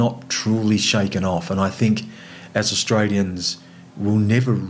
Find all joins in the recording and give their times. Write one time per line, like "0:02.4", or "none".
none